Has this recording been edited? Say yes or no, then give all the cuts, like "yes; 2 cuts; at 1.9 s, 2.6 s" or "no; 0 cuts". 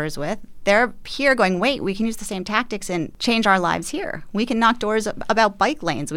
yes; 1 cut; at 3.1 s